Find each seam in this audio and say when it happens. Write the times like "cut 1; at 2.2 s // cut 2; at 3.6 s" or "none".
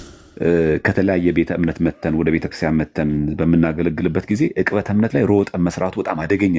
none